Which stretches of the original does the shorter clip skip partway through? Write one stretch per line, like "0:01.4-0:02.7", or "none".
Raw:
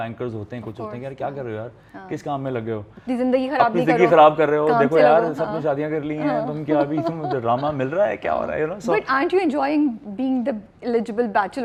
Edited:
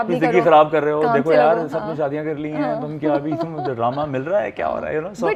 none